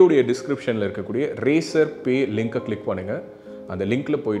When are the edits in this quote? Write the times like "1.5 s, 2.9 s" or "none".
none